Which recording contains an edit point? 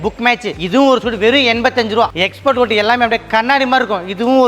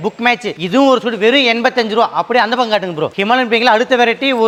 first; 1 cut; at 2.1 s

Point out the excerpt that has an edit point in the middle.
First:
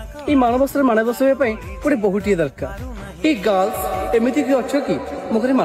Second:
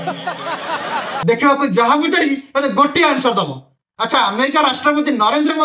second; 1 cut; at 1.1 s

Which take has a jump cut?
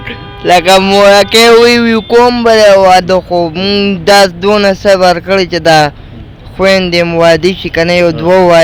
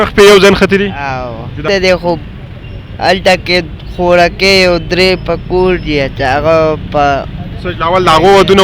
second; 1 cut; at 1.6 s

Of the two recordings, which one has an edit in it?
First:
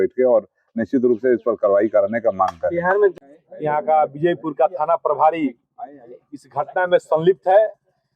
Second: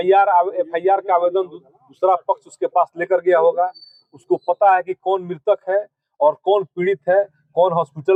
first; 1 cut; at 3.2 s

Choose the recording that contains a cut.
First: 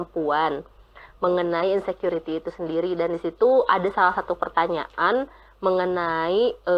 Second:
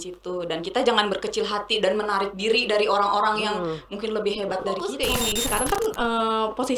second; 1 cut; at 4.9 s

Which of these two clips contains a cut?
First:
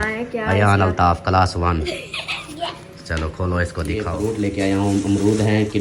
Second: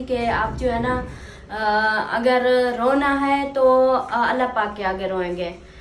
first; 1 cut; at 4.1 s

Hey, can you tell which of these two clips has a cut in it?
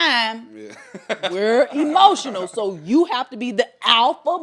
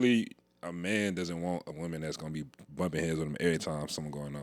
second; 1 cut; at 1.7 s

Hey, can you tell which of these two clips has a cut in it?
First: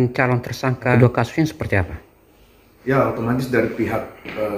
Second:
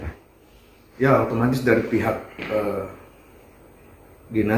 first; 1 cut; at 0.9 s

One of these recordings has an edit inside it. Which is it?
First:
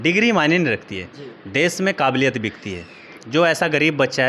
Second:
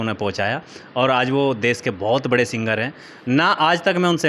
first; 1 cut; at 3.1 s

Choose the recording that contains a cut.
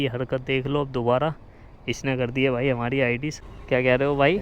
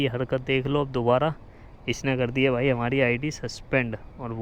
first; 1 cut; at 3.5 s

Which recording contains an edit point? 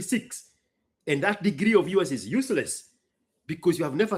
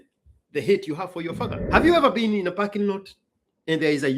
second; 1 cut; at 1.6 s

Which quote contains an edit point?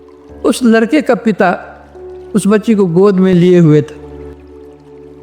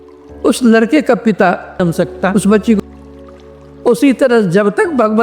second; 1 cut; at 2.8 s

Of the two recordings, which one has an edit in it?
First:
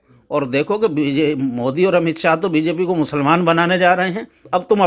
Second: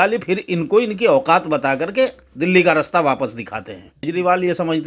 second; 1 cut; at 3.9 s

